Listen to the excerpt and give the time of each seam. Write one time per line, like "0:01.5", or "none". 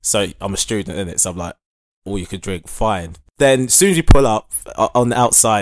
0:03.1